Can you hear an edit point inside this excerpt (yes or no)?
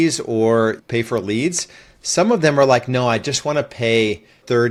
no